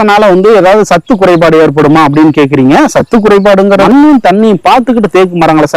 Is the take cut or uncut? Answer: cut